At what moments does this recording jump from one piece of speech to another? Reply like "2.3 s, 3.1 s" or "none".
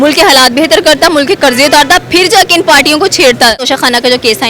3.6 s